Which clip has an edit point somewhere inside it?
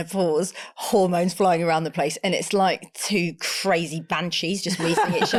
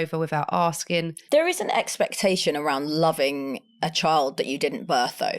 second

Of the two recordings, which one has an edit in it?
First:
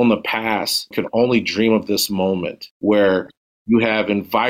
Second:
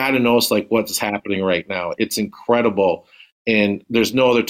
first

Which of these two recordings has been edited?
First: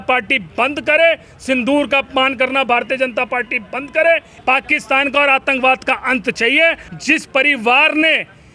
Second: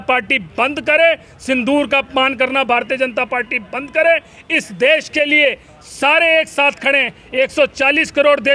first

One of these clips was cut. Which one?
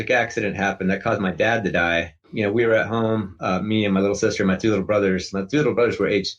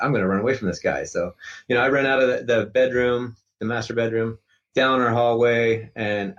first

